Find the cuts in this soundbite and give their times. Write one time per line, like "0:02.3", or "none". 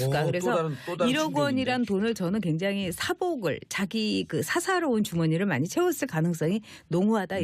0:01.5